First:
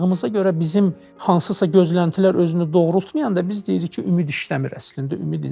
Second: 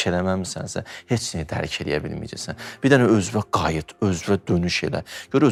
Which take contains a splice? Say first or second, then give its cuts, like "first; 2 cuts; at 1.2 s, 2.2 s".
first; 1 cut; at 1.1 s